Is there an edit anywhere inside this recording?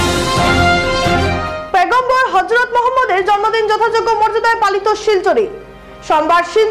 yes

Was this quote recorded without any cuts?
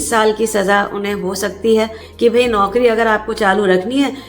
no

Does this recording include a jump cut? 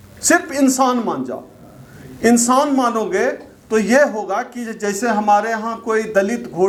no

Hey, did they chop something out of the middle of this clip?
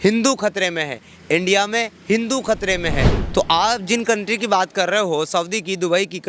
yes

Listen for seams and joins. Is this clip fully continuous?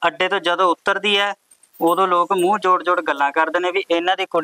yes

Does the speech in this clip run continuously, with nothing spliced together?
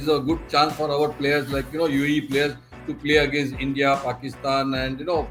yes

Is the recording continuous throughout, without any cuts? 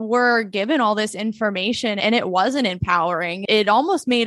no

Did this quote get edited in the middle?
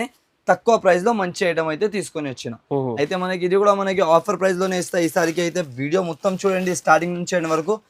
no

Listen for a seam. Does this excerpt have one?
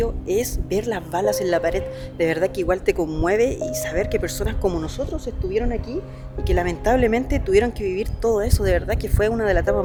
no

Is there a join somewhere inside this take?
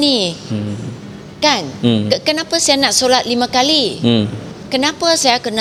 no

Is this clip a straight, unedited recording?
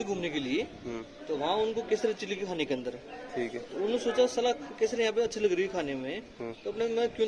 yes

